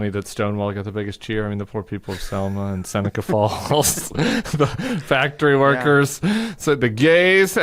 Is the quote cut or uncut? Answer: uncut